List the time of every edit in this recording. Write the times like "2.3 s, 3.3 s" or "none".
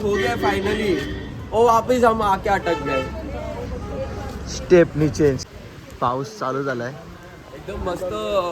5.4 s

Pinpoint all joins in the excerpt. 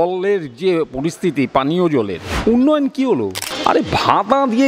2.2 s, 3.5 s

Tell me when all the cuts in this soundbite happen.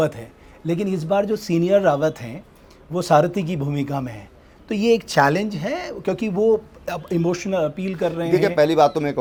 none

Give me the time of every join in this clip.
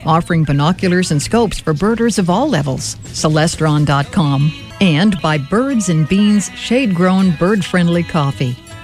4.6 s

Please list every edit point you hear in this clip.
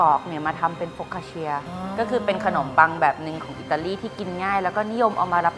1.7 s

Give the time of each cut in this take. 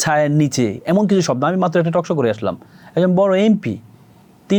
none

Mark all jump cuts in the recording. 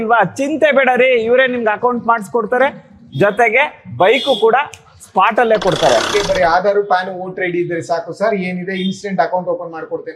6.1 s

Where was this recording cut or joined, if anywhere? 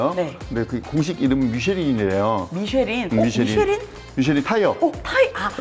none

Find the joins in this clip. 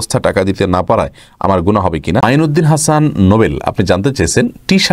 2.2 s

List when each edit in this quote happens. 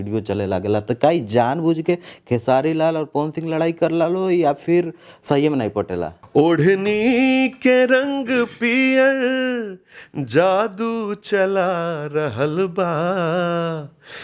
6.2 s

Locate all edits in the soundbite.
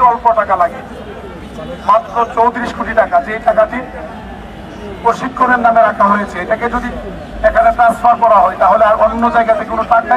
none

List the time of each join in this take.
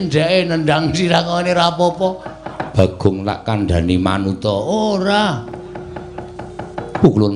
5.5 s

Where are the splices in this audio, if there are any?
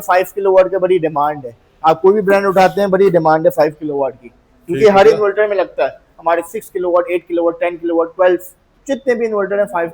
none

